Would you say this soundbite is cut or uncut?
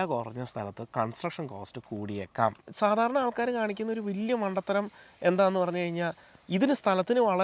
cut